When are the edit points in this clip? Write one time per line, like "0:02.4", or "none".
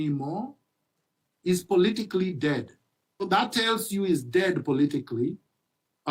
0:03.3